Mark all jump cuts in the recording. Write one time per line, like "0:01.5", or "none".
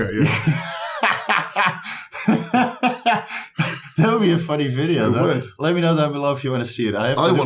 none

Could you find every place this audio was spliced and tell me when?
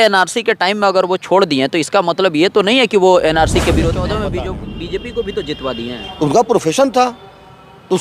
0:04.1

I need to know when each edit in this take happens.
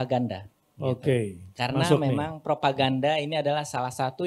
none

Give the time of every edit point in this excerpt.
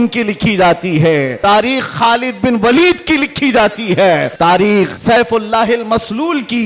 0:01.3
0:04.3
0:05.0

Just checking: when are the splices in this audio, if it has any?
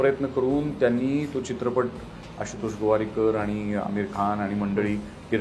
none

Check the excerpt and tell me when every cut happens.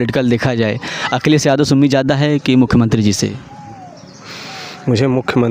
none

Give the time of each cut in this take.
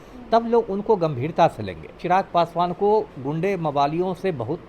0:01.9

